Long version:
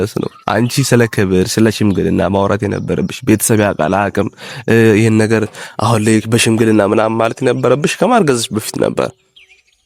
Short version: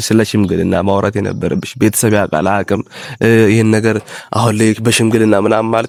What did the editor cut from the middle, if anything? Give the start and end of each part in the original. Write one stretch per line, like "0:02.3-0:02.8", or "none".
none

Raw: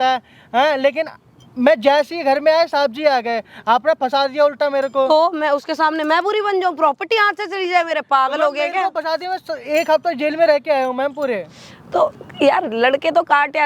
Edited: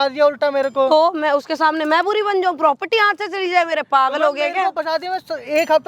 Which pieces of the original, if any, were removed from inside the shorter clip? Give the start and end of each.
none

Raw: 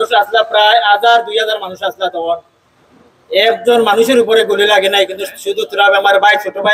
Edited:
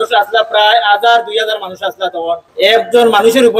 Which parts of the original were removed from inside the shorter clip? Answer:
0:02.5-0:03.2

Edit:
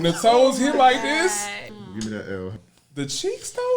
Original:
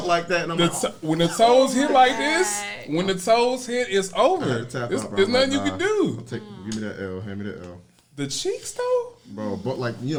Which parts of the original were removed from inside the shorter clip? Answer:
0:02.7-0:06.3
0:07.3-0:07.8

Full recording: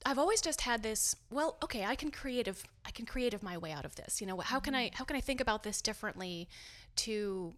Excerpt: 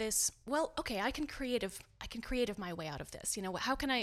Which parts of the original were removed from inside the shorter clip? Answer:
none

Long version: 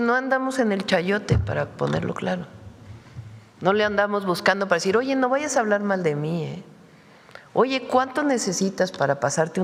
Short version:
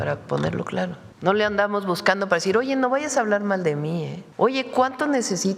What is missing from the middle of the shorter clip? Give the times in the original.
0:02.6-0:03.5
0:06.6-0:07.3

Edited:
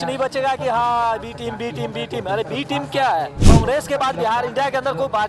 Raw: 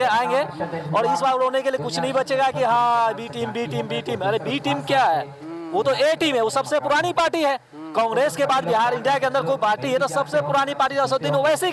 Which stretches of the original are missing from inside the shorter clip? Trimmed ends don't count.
0:05.3-0:07.9

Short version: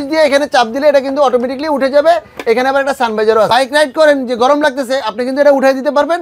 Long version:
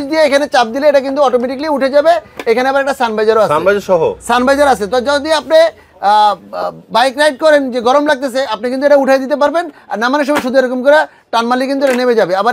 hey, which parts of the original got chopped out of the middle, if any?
0:03.5-0:06.9

